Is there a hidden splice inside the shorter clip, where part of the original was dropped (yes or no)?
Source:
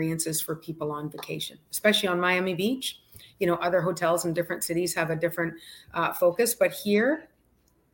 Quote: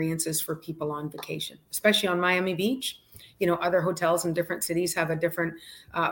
no